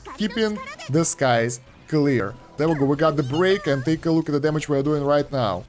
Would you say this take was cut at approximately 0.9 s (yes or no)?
no